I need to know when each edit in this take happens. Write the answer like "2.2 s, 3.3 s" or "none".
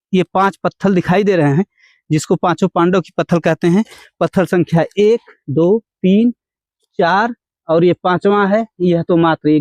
none